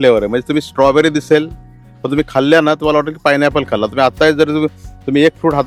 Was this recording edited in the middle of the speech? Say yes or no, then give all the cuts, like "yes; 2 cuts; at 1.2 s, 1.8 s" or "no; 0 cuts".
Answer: no; 0 cuts